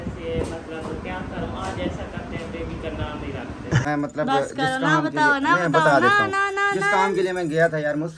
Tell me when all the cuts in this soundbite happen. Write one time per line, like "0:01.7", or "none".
0:03.8